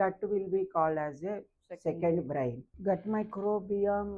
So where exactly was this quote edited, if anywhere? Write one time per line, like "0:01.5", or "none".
0:02.7